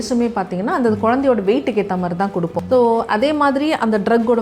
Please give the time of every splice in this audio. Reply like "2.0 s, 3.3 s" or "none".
2.6 s